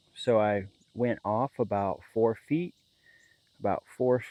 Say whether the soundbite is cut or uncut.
uncut